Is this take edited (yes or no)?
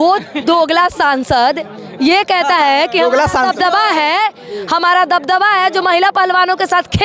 no